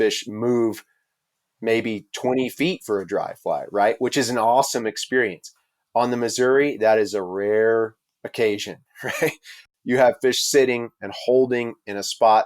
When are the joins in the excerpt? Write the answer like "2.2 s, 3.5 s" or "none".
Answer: 9.6 s